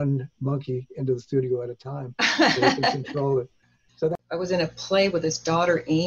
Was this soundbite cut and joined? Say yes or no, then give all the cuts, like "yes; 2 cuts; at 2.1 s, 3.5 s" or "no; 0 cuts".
yes; 1 cut; at 4.1 s